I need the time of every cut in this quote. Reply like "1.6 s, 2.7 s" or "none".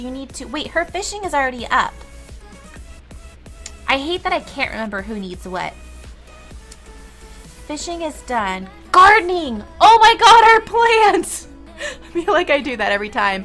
2.4 s